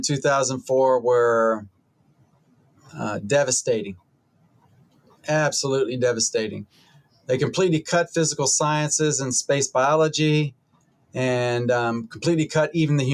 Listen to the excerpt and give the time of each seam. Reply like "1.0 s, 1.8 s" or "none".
none